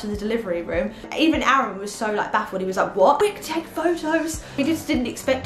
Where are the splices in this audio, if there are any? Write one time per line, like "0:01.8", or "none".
0:01.1
0:03.2
0:04.6